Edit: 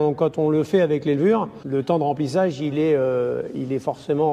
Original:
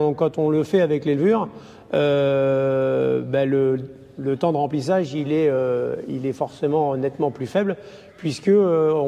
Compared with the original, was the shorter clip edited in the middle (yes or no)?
yes